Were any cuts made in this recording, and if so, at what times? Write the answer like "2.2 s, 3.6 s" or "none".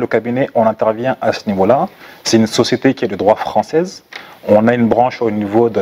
none